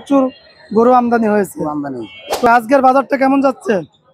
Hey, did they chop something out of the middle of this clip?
yes; 1 cut; at 2.5 s

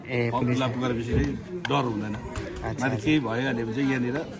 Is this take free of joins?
yes; 0 cuts

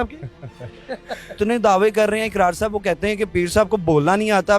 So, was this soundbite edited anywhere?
yes; 1 cut; at 1.4 s

